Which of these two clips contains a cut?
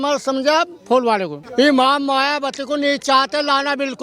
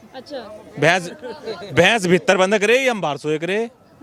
first; 1 cut; at 1.4 s

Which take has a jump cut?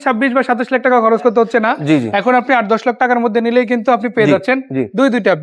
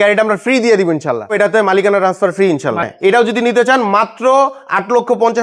second; 2 cuts; at 1.3 s, 2.9 s

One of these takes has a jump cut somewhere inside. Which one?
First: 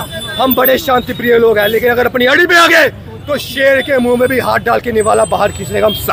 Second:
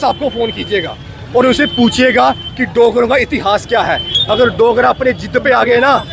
second; 1 cut; at 4.1 s

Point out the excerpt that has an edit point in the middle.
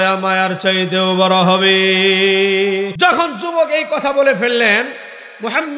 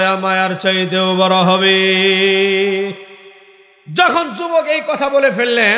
first; 1 cut; at 2.9 s

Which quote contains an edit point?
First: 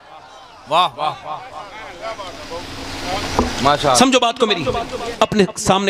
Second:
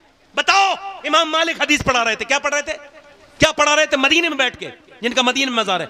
first; 1 cut; at 5.0 s

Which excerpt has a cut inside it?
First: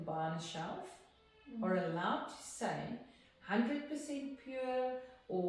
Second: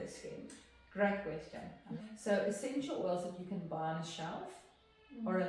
second; 1 cut; at 2.0 s

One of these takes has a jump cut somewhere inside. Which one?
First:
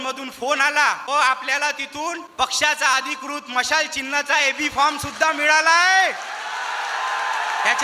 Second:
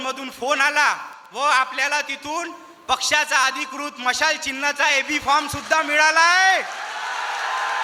first; 2 cuts; at 1.0 s, 2.2 s

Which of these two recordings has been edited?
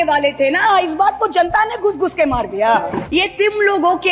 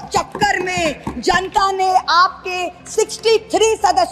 first; 1 cut; at 3.1 s

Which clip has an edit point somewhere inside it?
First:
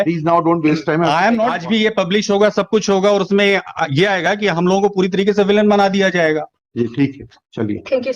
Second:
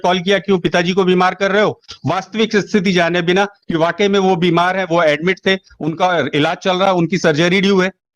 first; 1 cut; at 1.6 s

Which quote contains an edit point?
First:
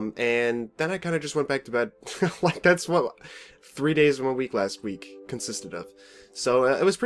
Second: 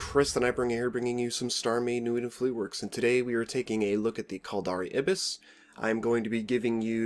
first; 1 cut; at 2.6 s

